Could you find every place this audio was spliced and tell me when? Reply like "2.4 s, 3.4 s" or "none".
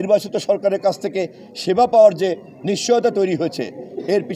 none